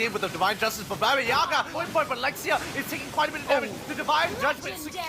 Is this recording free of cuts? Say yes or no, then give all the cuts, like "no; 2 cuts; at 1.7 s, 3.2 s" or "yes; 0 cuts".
no; 1 cut; at 1.8 s